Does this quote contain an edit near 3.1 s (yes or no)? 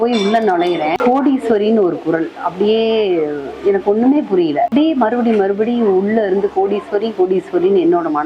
no